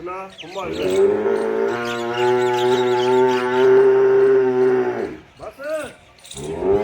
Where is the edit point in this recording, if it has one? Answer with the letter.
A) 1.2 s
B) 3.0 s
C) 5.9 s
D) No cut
D